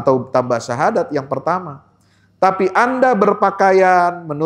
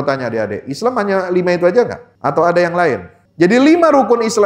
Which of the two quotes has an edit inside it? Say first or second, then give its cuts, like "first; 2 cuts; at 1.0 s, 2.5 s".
second; 2 cuts; at 2.1 s, 3.2 s